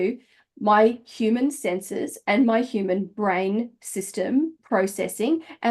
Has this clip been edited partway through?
yes; 1 cut; at 4.6 s

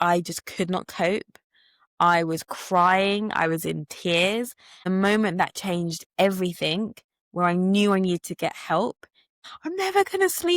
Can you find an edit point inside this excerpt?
yes; 2 cuts; at 4.9 s, 9.4 s

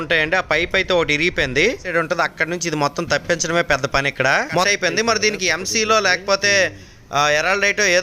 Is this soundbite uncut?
no; 2 cuts; at 1.8 s, 4.7 s

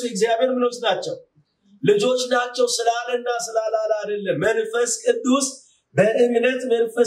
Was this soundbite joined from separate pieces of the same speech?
no; 0 cuts

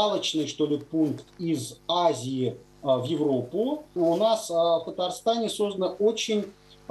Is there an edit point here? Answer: yes; 1 cut; at 3.9 s

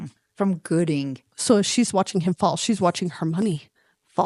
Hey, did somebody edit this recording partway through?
yes; 1 cut; at 1.3 s

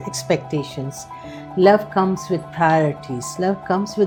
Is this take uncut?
yes; 0 cuts

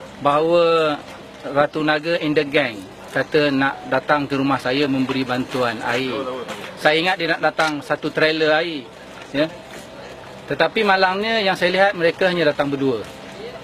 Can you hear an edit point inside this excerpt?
no; 0 cuts

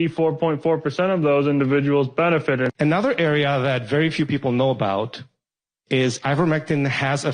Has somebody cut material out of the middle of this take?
yes; 1 cut; at 2.7 s

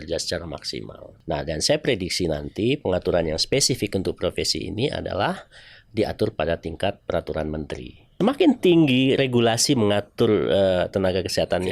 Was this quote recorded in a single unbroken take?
no; 2 cuts; at 1.0 s, 8.0 s

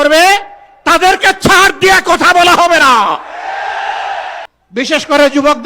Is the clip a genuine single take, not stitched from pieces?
no; 1 cut; at 4.5 s

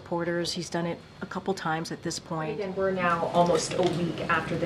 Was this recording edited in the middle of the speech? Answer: yes; 1 cut; at 2.6 s

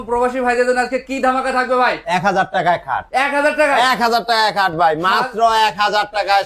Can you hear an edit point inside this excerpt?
no; 0 cuts

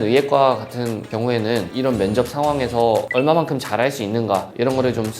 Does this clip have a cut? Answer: yes; 1 cut; at 1.7 s

